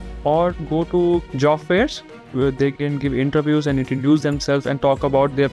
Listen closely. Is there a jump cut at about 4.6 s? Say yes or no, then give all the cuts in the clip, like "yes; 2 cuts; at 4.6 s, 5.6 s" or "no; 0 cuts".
no; 2 cuts; at 1.3 s, 2.2 s